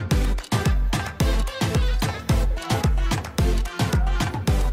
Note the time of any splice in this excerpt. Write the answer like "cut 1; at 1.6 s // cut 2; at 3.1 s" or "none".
none